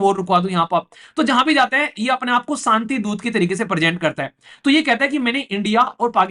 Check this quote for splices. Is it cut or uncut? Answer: uncut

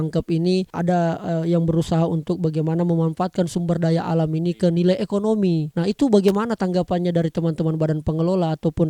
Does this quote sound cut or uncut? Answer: uncut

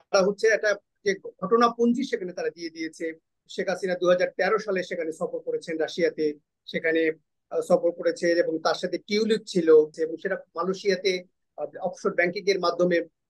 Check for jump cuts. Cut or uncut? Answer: cut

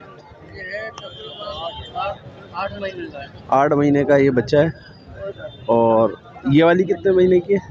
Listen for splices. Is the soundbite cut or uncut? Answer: uncut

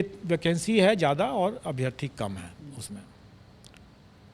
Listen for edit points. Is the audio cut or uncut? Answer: uncut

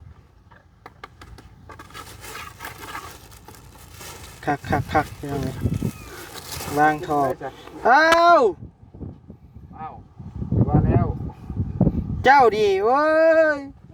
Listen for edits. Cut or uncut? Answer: cut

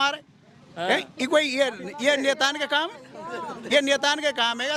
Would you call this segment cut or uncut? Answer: uncut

